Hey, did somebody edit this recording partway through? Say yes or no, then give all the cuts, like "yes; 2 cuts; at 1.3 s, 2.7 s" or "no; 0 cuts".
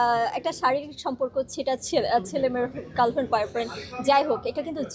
no; 0 cuts